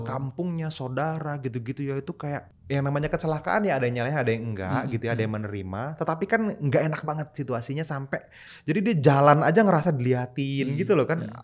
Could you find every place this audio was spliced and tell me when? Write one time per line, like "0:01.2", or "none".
0:02.5
0:08.4